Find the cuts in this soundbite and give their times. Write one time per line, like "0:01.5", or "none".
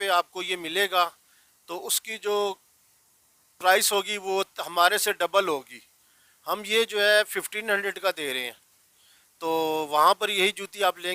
none